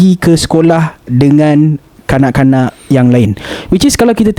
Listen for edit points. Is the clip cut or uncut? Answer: uncut